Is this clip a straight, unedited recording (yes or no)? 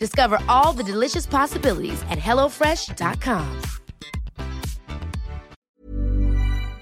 no